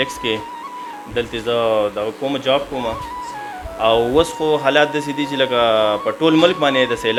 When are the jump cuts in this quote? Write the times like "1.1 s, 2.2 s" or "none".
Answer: none